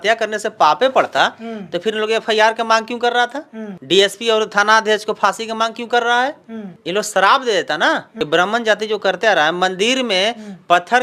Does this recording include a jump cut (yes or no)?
yes